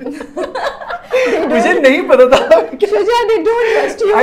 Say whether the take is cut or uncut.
uncut